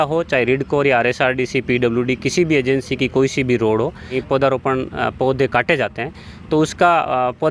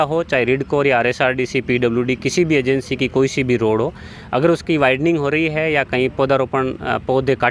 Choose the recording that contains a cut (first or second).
first